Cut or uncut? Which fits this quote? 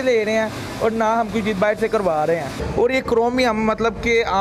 cut